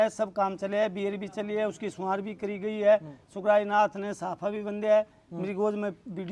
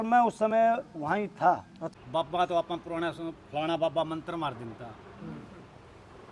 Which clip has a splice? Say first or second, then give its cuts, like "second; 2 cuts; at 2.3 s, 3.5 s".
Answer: second; 1 cut; at 1.8 s